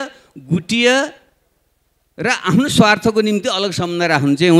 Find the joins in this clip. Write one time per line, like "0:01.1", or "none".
none